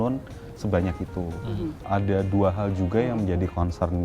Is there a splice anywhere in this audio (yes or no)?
yes